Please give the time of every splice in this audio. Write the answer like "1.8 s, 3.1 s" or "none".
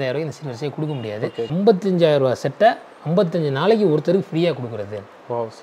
1.4 s